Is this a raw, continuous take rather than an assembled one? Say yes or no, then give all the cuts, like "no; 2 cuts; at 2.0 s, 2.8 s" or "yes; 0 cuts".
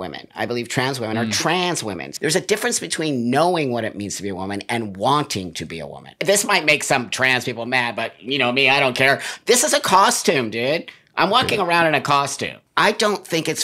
no; 3 cuts; at 2.1 s, 6.2 s, 12.6 s